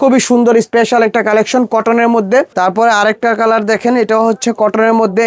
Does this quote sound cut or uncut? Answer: cut